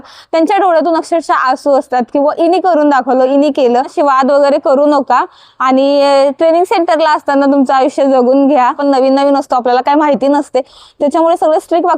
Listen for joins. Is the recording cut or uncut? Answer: cut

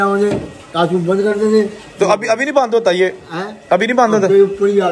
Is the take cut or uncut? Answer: uncut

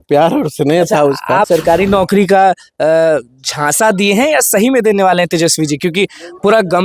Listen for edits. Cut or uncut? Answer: cut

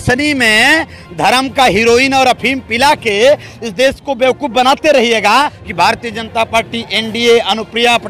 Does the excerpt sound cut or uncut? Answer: cut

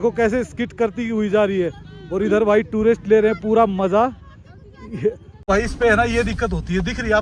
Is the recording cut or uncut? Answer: cut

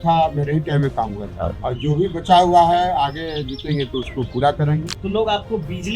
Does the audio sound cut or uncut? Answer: cut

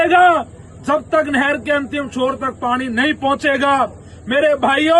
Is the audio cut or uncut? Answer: uncut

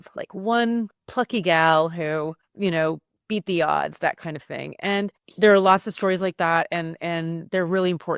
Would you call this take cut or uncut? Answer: cut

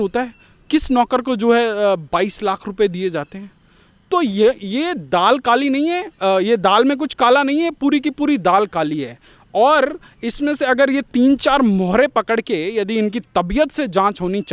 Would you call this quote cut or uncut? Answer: uncut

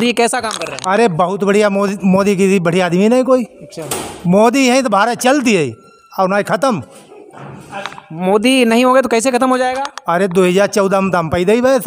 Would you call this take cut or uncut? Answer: uncut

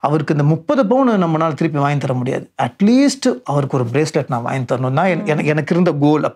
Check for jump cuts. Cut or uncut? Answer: uncut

